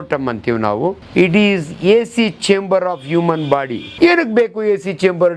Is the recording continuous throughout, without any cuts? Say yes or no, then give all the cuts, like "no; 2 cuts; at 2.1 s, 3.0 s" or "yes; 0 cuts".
no; 2 cuts; at 1.0 s, 3.8 s